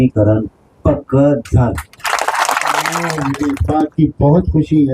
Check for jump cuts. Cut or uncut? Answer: cut